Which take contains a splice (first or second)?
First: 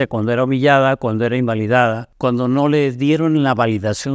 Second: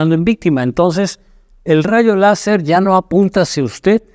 first